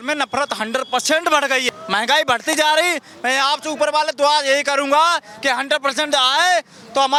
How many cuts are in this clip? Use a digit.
0